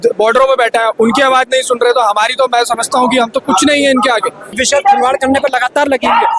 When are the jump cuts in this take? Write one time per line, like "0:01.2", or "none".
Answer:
0:04.6